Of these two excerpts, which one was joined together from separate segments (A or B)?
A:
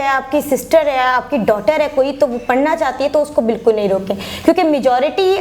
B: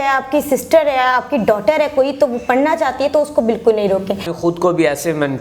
B